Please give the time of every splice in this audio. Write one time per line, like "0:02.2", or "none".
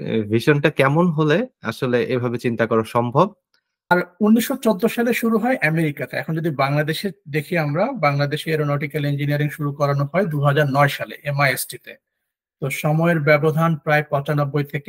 0:03.9